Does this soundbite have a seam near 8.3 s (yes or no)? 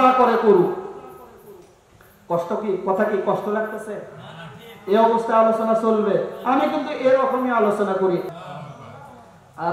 yes